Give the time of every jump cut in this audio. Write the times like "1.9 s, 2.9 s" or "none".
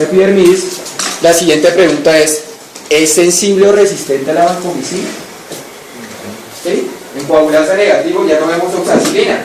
3.9 s